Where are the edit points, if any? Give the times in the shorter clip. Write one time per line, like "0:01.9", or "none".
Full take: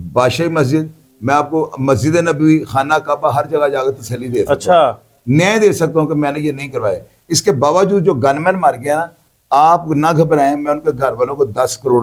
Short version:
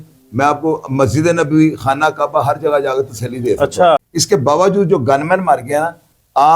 0:04.1